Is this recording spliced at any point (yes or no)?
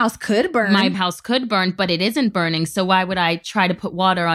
no